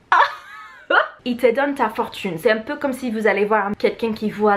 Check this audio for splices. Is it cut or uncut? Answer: cut